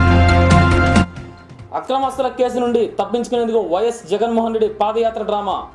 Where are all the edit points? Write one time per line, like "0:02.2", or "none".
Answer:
none

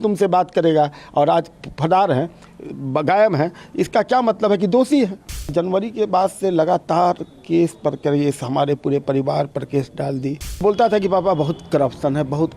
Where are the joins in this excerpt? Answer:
0:05.5
0:10.6

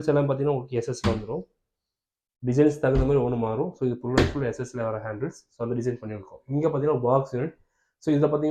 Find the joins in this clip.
none

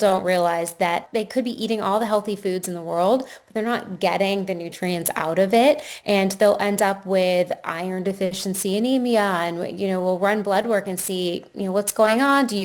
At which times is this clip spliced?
0:01.0

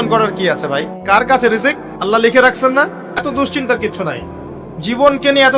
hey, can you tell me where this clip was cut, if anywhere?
0:00.9
0:01.9
0:03.3

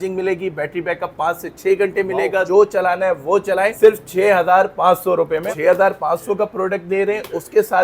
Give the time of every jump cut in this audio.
0:02.5
0:03.7
0:05.5

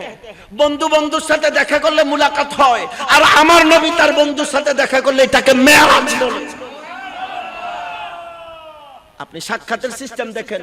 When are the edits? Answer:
none

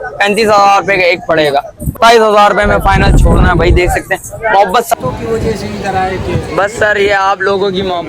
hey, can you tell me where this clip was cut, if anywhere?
0:01.9
0:04.9

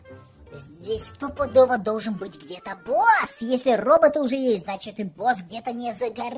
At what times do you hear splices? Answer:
none

